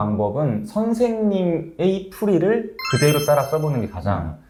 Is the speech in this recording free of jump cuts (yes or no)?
yes